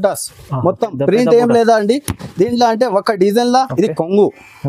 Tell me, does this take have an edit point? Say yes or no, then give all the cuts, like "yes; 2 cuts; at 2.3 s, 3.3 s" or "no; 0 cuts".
yes; 1 cut; at 3.7 s